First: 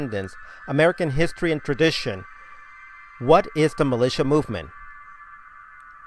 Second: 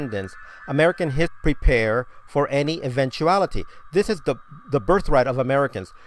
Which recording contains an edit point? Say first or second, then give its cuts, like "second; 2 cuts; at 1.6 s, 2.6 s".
first; 1 cut; at 1.4 s